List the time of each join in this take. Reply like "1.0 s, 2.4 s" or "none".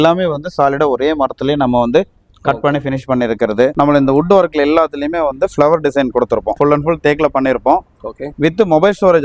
3.7 s, 6.5 s